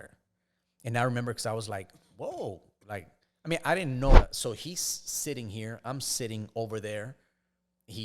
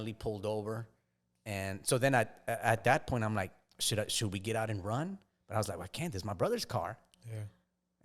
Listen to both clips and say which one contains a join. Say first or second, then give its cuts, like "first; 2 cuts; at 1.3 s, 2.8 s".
first; 1 cut; at 4.1 s